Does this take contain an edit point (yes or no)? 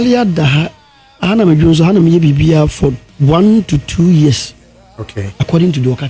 no